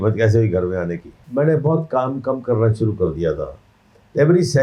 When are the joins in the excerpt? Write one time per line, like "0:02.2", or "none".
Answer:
0:01.2